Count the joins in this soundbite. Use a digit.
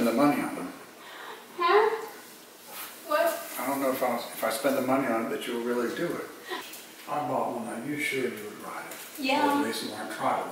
1